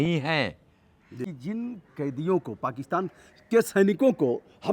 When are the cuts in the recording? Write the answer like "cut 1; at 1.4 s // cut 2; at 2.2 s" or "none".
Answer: cut 1; at 1.2 s